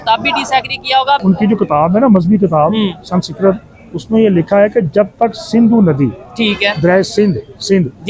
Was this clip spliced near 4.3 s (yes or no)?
no